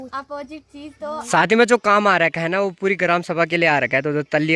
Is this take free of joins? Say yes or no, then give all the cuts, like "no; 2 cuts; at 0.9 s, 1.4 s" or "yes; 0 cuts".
no; 1 cut; at 1.2 s